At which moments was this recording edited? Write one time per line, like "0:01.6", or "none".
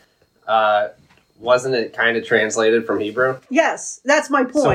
none

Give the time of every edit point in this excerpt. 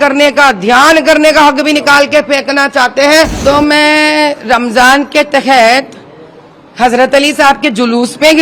0:03.3

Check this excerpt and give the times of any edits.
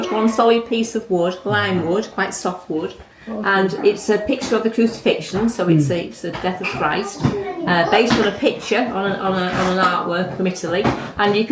none

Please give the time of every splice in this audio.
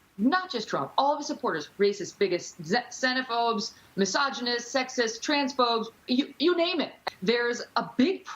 0:07.0

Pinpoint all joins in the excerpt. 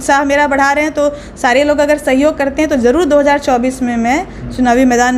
none

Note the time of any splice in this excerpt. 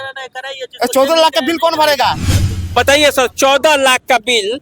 0:02.5

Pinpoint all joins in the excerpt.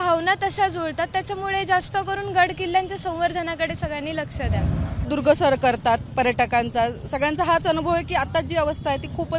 0:05.1

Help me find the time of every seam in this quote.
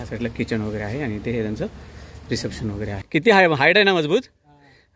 0:03.3

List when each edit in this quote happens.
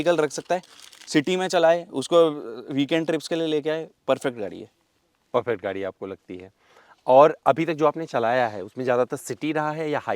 none

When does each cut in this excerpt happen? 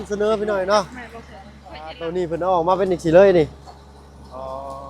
0:02.0

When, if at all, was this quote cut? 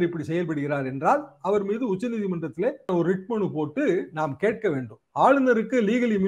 0:02.9
0:05.0

